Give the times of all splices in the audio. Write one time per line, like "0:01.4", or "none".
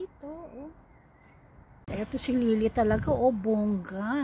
0:01.9